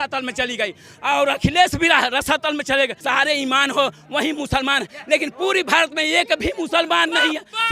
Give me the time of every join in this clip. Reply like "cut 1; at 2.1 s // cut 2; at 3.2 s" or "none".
cut 1; at 3.0 s